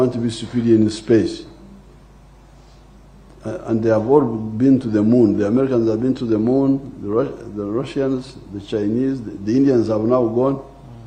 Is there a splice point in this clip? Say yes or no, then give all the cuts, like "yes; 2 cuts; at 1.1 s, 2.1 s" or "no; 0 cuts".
no; 0 cuts